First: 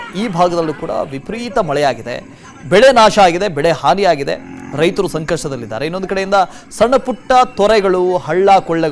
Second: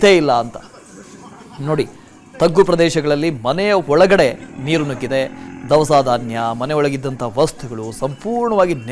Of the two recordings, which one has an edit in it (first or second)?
first